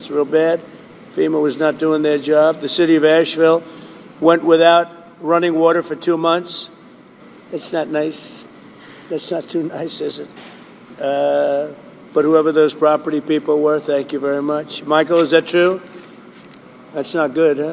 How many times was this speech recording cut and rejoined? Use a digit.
0